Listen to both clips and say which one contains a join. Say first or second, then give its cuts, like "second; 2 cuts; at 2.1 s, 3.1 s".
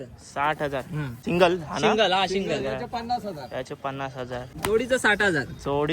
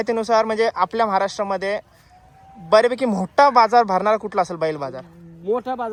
first; 2 cuts; at 1.1 s, 4.5 s